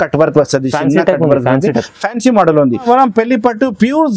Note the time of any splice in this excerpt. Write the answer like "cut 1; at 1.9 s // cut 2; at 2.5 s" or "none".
cut 1; at 2.9 s